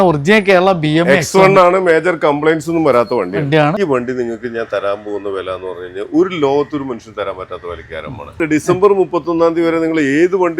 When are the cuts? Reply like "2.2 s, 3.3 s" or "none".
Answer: 3.8 s, 8.4 s